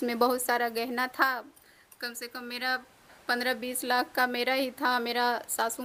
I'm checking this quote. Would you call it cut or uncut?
uncut